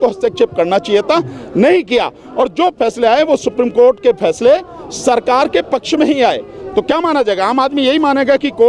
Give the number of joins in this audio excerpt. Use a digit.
0